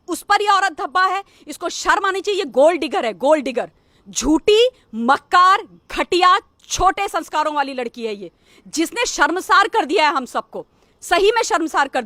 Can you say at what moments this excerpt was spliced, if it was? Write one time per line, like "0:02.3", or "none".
none